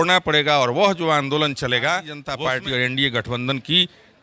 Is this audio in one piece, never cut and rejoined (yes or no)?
no